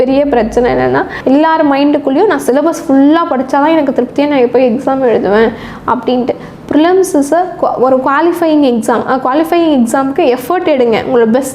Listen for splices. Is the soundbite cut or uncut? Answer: uncut